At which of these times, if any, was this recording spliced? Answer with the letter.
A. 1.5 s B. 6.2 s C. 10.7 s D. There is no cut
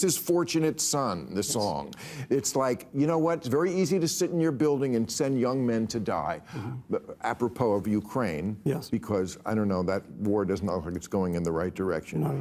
A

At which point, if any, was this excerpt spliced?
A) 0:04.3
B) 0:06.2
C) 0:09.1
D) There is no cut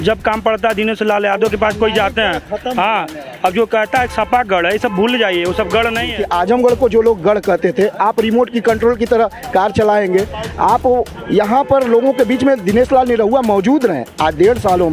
B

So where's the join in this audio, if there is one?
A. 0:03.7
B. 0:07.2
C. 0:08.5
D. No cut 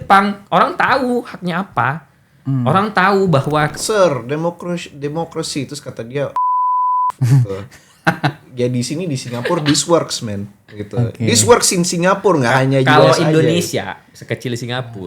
A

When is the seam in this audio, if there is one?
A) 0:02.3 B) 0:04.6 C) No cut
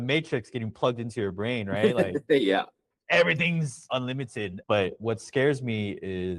B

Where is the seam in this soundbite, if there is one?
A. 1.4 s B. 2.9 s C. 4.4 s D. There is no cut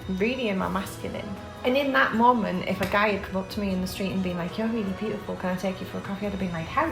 A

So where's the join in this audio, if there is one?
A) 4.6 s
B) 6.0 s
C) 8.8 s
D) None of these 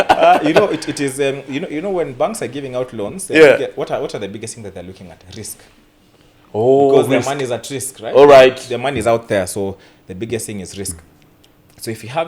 D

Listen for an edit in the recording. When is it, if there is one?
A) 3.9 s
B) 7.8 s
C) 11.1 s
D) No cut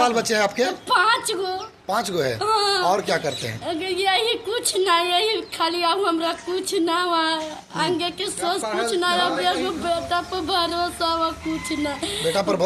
D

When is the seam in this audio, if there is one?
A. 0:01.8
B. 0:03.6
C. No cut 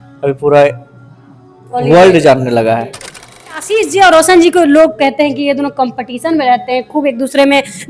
B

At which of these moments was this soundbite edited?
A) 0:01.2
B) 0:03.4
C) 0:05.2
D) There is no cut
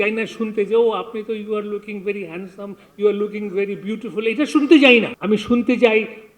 C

